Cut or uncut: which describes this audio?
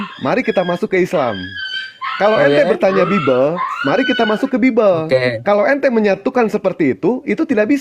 uncut